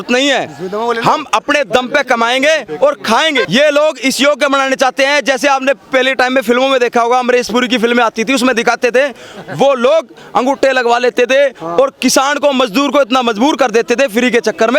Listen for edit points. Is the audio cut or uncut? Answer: uncut